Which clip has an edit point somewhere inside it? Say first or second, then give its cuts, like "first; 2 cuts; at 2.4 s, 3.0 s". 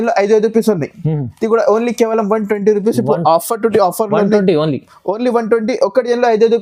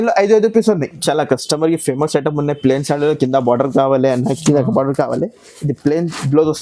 second; 1 cut; at 1.0 s